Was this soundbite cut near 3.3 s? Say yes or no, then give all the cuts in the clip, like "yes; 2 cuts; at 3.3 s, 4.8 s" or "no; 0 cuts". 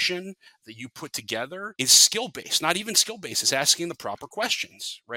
no; 1 cut; at 1.7 s